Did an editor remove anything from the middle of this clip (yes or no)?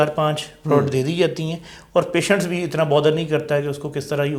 no